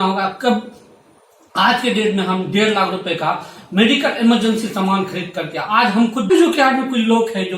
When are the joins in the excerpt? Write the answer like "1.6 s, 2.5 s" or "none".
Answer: 6.3 s

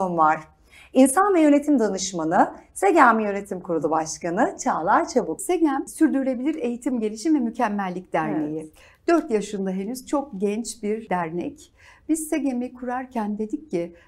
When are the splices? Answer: 5.6 s, 11.0 s

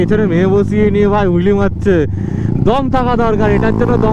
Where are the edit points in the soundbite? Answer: none

